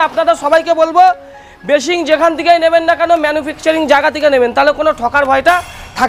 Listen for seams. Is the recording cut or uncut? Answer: uncut